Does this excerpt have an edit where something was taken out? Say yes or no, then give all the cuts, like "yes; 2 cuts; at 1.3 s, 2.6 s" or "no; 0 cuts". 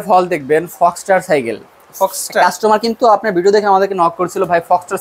no; 0 cuts